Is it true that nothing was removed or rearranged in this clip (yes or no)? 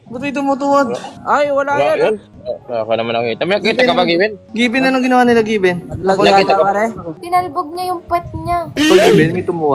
no